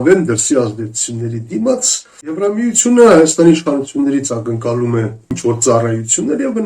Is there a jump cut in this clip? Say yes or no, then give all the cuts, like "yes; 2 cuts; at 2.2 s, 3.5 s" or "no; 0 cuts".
yes; 2 cuts; at 2.4 s, 5.3 s